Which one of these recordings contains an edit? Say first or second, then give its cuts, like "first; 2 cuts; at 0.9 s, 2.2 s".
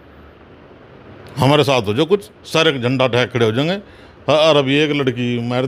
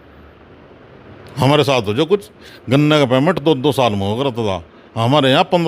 second; 1 cut; at 2.4 s